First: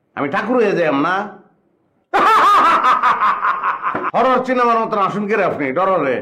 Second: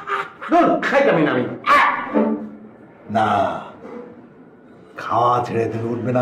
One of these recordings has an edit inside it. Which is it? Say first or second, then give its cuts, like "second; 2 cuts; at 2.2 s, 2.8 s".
first; 1 cut; at 4.1 s